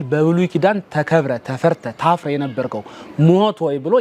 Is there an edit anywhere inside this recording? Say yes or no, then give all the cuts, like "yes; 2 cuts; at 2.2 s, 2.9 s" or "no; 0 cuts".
no; 0 cuts